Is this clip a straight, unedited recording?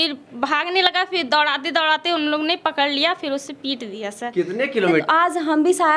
no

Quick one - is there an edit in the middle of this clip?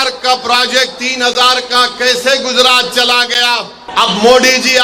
yes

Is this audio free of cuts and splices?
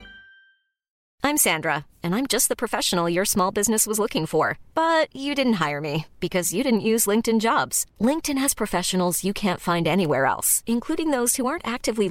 no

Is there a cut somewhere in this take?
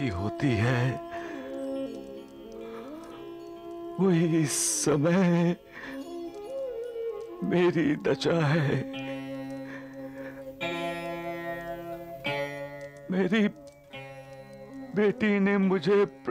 no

